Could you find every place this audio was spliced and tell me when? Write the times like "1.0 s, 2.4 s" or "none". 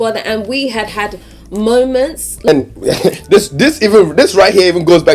2.5 s